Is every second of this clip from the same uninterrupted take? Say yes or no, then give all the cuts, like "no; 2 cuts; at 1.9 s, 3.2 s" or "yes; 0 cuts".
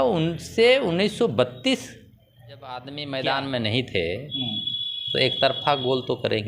no; 1 cut; at 2.9 s